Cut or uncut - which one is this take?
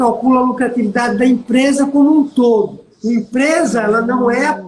uncut